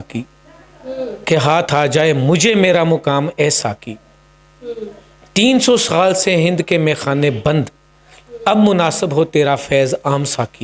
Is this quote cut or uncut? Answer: uncut